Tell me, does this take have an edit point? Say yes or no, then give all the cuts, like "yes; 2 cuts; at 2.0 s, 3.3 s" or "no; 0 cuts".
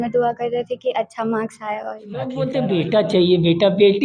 yes; 1 cut; at 2.3 s